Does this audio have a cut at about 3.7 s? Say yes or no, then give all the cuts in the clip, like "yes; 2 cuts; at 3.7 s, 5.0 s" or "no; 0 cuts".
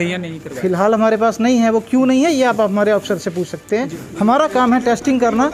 yes; 1 cut; at 3.7 s